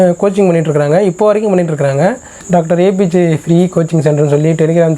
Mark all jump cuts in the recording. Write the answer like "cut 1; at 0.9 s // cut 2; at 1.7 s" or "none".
cut 1; at 2.4 s